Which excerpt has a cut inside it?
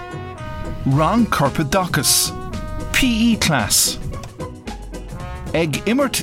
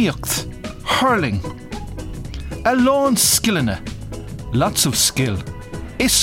first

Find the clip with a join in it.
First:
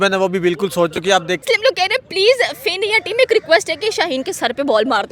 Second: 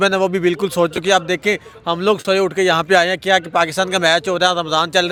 first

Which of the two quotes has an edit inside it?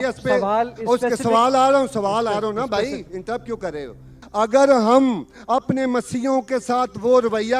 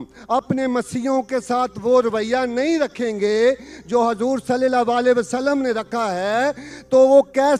first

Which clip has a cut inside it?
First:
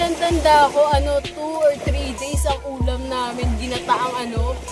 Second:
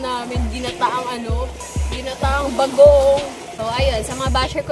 second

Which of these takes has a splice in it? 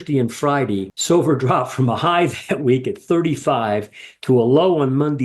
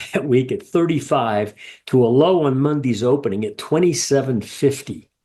first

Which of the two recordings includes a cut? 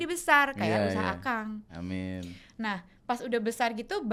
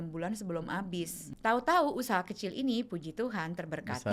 second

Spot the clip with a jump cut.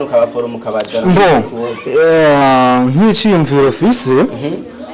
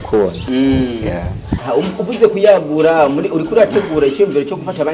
second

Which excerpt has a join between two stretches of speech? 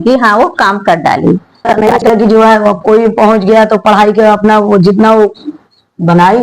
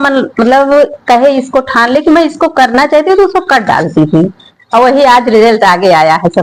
first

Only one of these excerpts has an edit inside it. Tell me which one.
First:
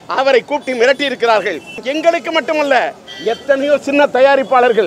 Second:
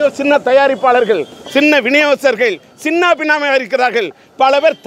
first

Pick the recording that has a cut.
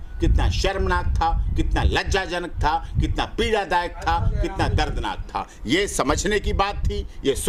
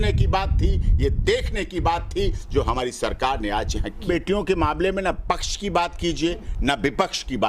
second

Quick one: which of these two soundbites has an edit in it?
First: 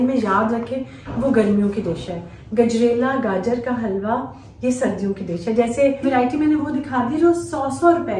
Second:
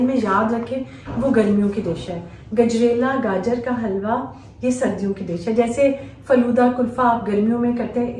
first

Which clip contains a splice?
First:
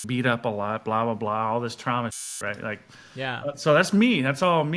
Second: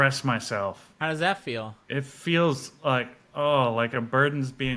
second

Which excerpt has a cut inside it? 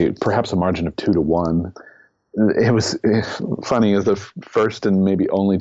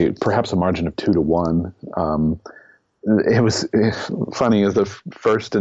first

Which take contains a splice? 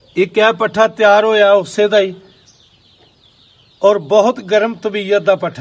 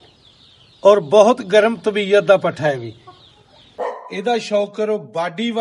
second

